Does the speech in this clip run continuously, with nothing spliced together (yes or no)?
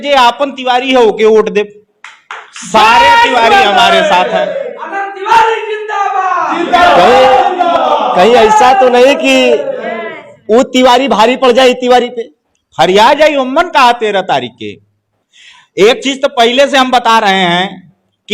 yes